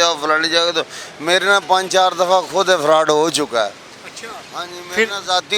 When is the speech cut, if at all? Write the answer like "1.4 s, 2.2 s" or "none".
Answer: none